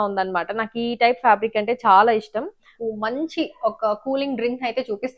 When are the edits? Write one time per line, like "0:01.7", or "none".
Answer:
0:02.7